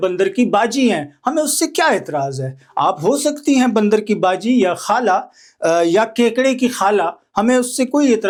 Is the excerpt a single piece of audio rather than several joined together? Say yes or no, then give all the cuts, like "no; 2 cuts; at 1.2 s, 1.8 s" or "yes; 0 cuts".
yes; 0 cuts